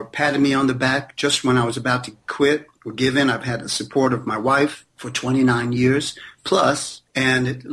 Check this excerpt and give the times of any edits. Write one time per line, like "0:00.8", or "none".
none